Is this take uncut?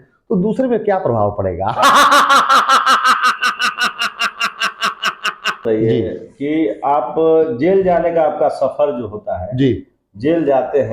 no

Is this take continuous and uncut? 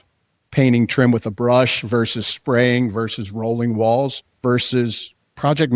no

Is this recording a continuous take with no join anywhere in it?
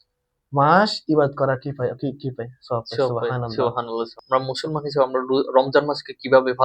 no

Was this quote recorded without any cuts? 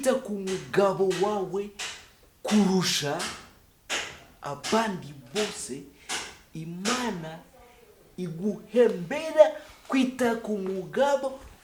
yes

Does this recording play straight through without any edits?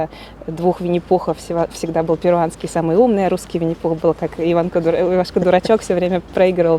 yes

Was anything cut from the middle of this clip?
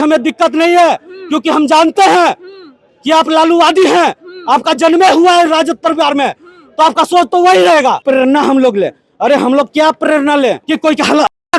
yes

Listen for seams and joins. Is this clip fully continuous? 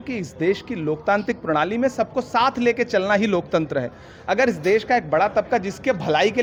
yes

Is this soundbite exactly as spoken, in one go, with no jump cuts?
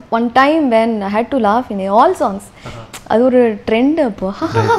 yes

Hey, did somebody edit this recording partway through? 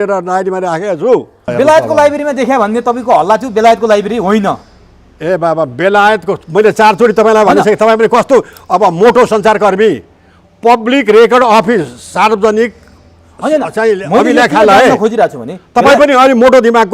yes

